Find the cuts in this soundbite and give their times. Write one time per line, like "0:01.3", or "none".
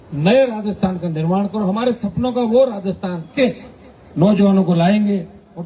0:03.3